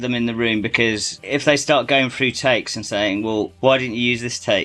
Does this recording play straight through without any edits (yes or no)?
no